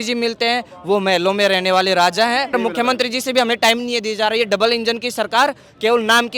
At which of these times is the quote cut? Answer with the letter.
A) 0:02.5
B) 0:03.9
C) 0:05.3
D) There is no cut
A